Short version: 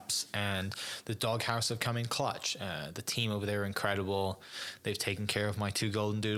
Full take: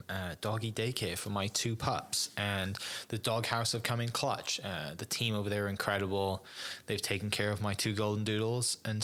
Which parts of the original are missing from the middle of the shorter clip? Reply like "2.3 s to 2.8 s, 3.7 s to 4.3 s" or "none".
none

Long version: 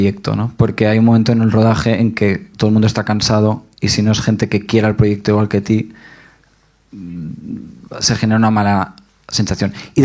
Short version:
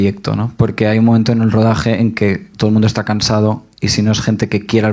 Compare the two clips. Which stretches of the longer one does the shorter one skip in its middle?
none

